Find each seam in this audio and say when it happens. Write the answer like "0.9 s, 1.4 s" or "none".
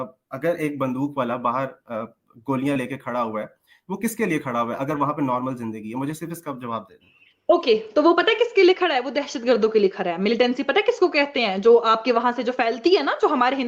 none